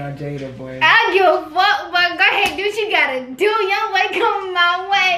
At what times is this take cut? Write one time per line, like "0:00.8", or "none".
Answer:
none